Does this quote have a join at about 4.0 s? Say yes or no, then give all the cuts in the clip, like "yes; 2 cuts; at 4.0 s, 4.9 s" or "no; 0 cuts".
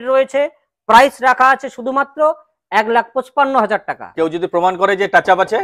yes; 1 cut; at 4.0 s